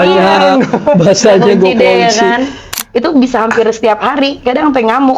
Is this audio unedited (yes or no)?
no